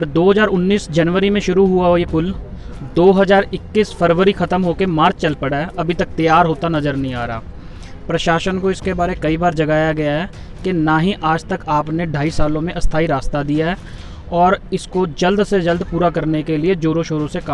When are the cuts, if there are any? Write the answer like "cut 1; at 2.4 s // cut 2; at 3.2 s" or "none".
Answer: none